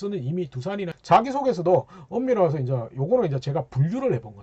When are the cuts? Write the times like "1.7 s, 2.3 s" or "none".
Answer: 1.0 s